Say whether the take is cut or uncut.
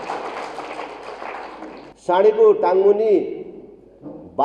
cut